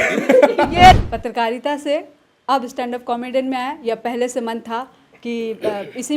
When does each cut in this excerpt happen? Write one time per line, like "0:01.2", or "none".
0:01.0